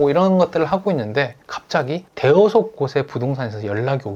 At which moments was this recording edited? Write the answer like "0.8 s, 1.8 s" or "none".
none